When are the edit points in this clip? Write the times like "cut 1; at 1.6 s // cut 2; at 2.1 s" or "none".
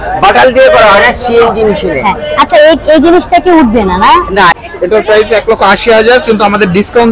cut 1; at 4.6 s